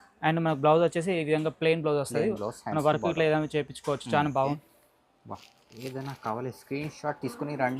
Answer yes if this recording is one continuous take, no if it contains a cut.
no